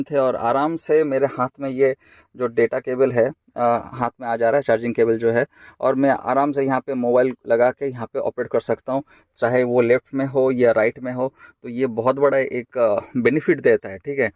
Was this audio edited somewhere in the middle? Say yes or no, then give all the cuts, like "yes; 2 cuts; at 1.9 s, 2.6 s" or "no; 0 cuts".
no; 0 cuts